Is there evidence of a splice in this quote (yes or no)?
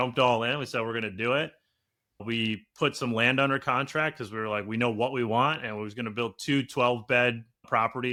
no